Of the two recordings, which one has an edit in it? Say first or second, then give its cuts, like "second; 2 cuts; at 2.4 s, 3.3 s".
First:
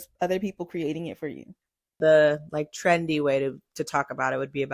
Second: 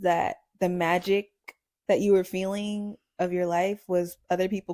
first; 1 cut; at 2.0 s